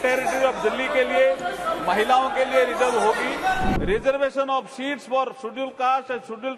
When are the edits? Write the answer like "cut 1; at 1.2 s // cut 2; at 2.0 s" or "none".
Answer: cut 1; at 3.7 s